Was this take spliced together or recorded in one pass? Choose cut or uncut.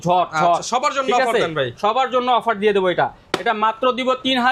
uncut